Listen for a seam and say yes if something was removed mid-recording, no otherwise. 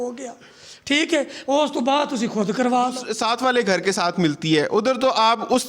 yes